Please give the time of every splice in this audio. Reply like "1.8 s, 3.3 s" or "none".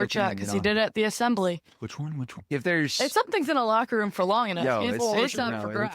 2.5 s